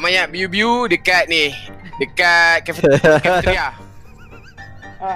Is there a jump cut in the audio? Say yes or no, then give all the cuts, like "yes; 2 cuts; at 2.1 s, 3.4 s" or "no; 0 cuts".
no; 0 cuts